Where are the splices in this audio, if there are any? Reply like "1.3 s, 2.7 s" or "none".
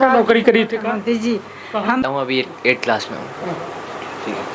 2.0 s